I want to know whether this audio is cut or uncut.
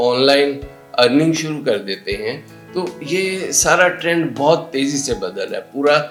uncut